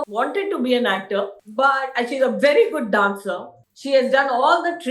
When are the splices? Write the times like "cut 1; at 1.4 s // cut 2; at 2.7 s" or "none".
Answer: none